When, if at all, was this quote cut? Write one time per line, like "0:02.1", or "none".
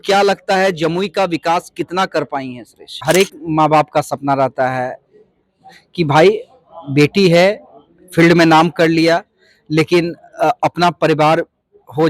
0:03.0